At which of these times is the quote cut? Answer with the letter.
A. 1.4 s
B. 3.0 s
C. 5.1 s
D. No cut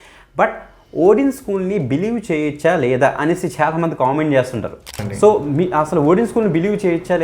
C